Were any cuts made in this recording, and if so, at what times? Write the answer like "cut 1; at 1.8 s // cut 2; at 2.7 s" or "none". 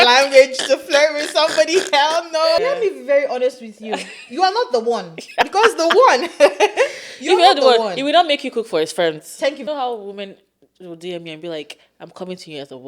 cut 1; at 2.6 s // cut 2; at 9.6 s